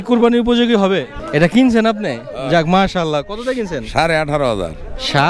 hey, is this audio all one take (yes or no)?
no